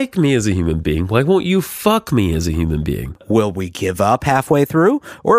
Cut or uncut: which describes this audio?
cut